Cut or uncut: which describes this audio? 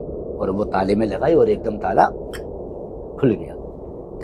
uncut